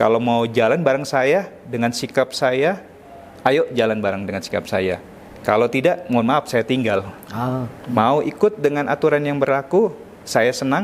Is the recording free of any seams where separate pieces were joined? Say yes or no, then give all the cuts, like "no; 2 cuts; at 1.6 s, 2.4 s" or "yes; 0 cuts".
no; 1 cut; at 7.7 s